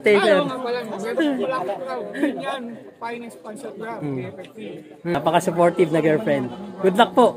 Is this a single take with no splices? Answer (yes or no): no